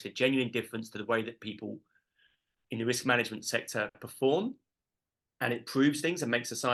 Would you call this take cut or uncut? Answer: uncut